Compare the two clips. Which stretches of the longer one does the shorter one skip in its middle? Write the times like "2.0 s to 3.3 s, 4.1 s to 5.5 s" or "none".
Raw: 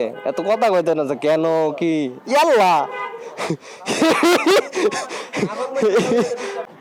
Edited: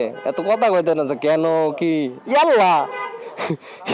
none